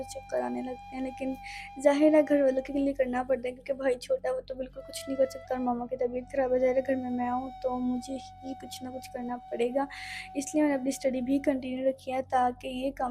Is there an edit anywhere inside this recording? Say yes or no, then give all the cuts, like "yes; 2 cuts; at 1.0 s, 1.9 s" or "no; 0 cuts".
no; 0 cuts